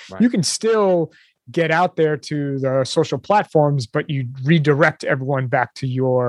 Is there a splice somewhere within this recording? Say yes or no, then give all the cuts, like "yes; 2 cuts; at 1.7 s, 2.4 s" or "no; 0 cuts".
no; 0 cuts